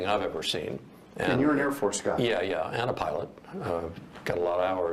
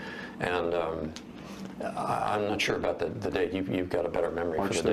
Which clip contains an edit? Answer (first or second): first